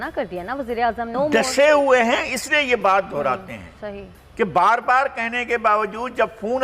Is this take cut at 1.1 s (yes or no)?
yes